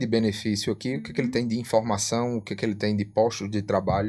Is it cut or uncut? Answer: uncut